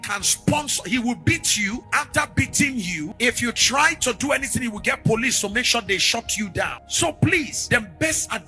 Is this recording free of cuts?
no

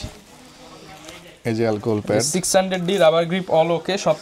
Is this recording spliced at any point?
no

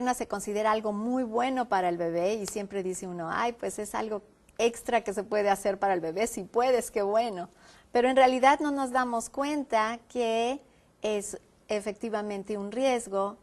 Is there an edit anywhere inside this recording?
yes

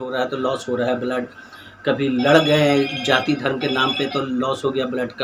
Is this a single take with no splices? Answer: yes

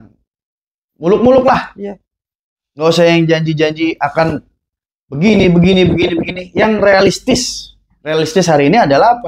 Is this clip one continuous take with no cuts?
yes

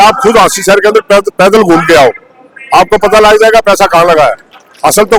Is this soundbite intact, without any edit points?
yes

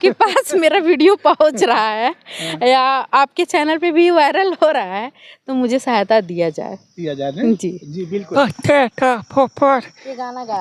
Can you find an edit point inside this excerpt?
yes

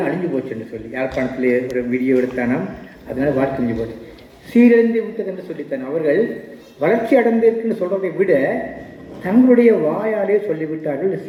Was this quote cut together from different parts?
no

